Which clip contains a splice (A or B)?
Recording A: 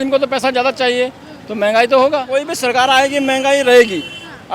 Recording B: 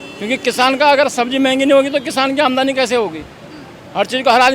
A